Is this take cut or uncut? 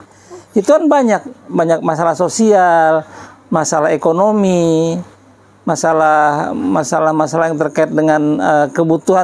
uncut